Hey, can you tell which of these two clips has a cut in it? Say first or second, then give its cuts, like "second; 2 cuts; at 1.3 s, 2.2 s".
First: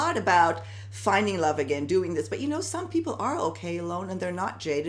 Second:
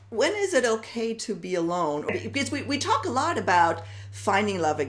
second; 1 cut; at 2.1 s